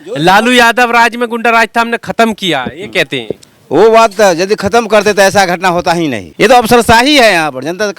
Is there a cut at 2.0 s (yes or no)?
no